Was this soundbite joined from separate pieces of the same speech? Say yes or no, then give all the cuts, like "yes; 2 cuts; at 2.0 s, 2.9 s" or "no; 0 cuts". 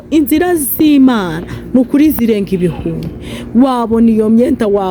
no; 0 cuts